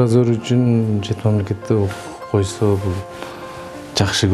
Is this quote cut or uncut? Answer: uncut